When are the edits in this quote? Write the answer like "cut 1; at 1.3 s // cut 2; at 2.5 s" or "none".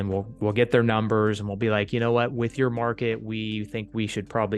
none